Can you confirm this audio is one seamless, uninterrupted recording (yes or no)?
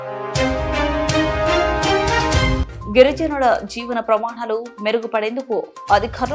yes